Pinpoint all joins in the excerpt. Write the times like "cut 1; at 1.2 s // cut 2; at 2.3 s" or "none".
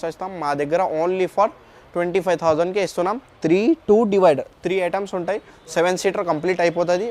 none